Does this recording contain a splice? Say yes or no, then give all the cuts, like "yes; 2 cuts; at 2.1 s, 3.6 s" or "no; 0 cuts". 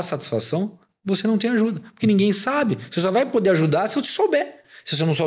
no; 0 cuts